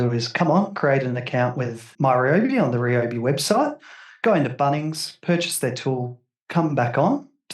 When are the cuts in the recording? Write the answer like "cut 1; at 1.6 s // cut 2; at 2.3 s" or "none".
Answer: cut 1; at 1.9 s